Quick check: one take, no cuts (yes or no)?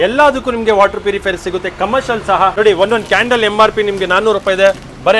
no